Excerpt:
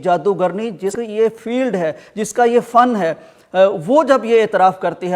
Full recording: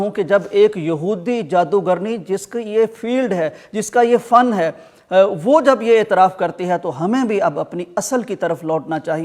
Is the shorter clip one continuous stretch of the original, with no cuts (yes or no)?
no